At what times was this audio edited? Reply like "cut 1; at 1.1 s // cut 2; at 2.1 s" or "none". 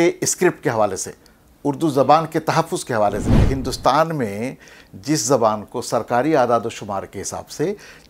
cut 1; at 3.3 s